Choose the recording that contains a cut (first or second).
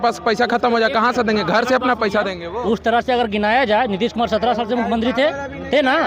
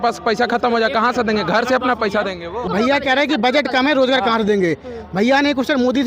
second